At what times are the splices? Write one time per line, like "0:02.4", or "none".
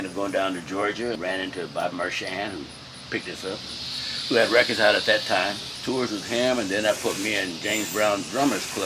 0:01.2
0:05.7